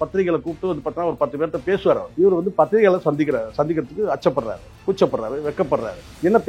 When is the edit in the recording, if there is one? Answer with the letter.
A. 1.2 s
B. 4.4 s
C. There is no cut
C